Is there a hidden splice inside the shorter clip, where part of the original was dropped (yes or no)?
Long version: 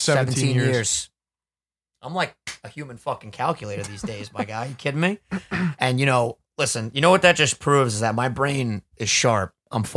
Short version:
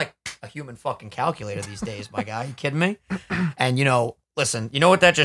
no